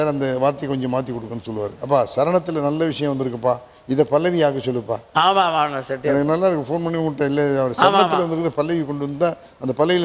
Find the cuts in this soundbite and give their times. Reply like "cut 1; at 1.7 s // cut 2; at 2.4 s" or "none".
cut 1; at 1.7 s